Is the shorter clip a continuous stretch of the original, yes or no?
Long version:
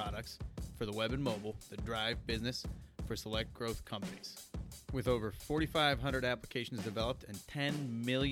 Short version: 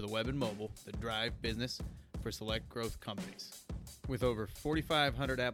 yes